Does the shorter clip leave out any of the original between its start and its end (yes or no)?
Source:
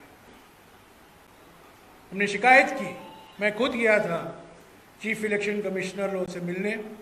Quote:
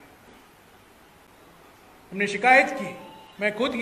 no